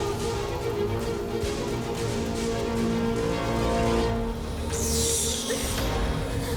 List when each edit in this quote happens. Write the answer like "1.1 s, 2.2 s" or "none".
4.5 s

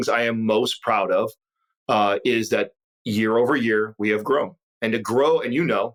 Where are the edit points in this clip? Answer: none

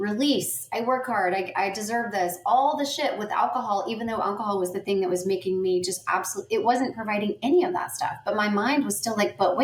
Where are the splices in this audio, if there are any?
none

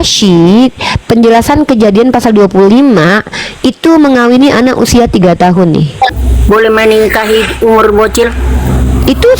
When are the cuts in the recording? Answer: 6.3 s

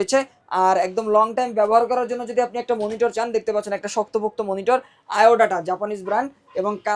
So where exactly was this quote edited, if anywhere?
none

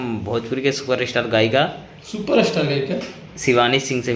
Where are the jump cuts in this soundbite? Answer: none

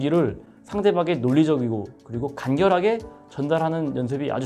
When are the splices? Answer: none

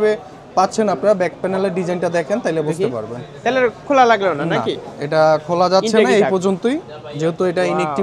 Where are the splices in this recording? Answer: none

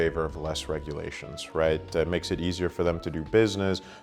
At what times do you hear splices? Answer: none

